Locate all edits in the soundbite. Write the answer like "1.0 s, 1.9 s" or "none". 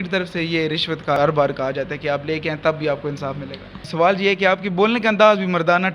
1.2 s, 3.9 s